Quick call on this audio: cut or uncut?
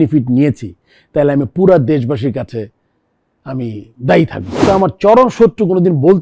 cut